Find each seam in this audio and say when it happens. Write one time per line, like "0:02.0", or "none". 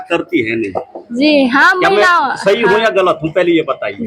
none